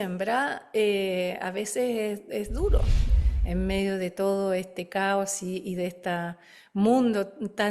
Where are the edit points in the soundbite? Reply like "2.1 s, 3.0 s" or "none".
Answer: 3.0 s